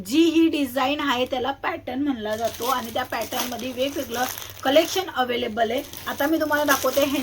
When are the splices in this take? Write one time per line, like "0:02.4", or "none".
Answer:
none